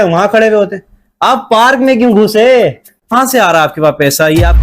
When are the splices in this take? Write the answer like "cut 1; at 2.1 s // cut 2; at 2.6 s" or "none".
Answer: cut 1; at 3.1 s